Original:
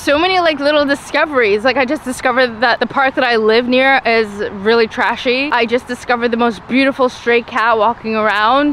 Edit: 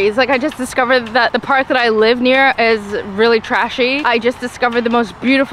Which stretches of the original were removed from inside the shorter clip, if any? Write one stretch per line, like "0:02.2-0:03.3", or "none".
none